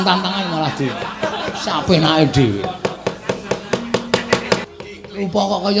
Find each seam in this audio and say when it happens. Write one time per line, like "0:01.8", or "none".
0:04.6

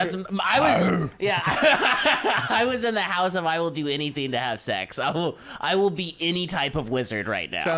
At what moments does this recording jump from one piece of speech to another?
none

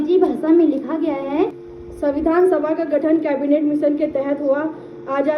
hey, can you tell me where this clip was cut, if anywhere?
0:01.6

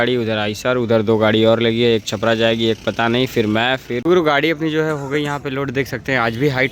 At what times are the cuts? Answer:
0:03.9

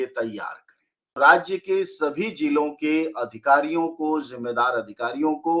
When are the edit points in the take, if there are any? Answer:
0:01.2

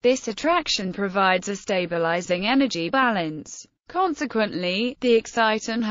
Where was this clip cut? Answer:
none

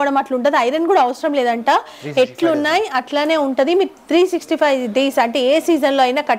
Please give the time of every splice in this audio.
none

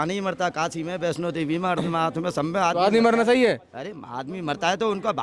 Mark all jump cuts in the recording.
none

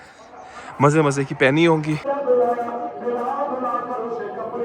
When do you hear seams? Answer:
0:02.0

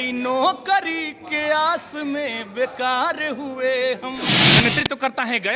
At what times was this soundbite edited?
0:04.4

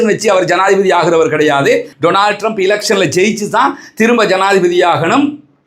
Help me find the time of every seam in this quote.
0:01.9

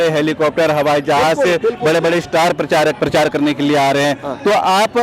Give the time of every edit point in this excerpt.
0:03.0

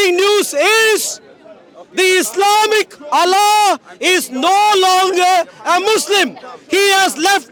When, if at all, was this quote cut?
none

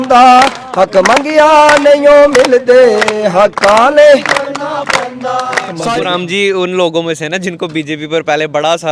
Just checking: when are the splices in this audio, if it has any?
0:05.7

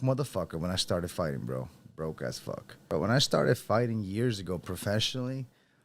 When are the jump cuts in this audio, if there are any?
0:02.7

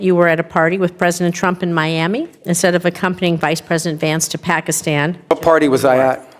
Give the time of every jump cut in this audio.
0:05.3

